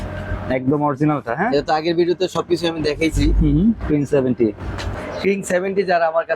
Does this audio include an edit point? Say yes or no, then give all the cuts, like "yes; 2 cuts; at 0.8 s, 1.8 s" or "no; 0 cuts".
yes; 1 cut; at 5.0 s